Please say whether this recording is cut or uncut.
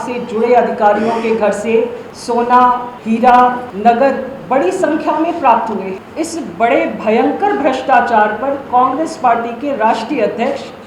cut